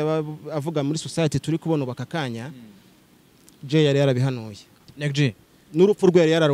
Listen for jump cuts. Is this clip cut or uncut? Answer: uncut